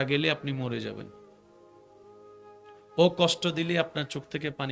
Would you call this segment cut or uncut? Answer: cut